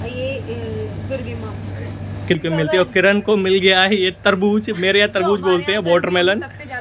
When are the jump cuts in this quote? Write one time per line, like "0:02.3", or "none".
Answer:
0:02.4